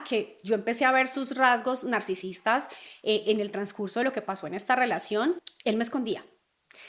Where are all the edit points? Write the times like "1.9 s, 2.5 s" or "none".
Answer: 5.4 s